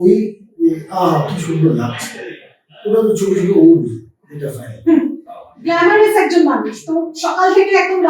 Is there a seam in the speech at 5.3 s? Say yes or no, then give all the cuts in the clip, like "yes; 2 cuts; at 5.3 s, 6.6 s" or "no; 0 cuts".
no; 0 cuts